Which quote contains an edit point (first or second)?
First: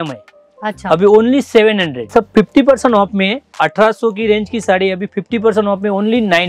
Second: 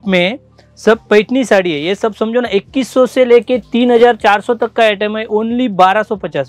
first